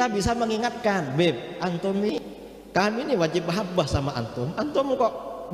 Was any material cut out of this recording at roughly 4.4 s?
no; 1 cut; at 2.2 s

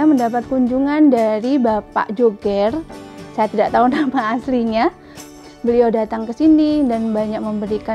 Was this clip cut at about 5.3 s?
yes; 1 cut; at 5.3 s

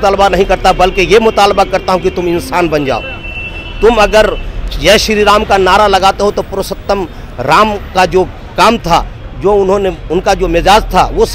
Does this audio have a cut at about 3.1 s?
no; 0 cuts

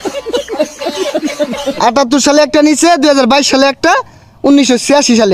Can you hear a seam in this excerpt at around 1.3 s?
yes; 1 cut; at 1.3 s

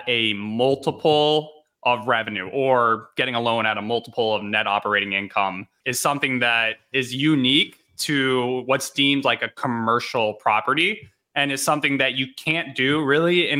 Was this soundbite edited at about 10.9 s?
no; 1 cut; at 5.8 s

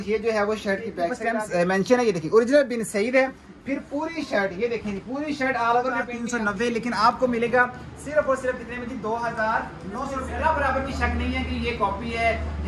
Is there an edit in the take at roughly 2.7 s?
no; 3 cuts; at 1.2 s, 6.2 s, 10.3 s

